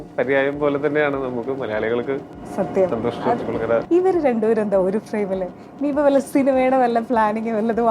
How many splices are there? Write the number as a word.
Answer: one